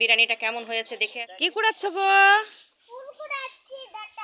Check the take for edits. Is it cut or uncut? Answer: cut